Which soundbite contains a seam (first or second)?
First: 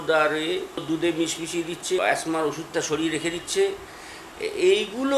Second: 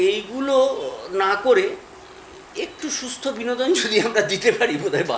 first